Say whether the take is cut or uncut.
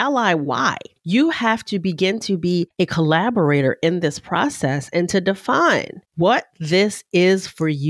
cut